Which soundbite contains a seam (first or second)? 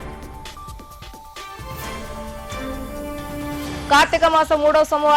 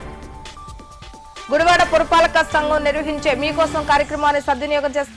second